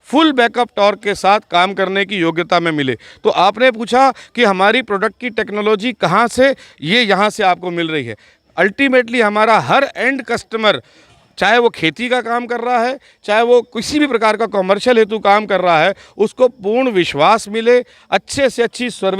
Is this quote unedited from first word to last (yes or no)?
yes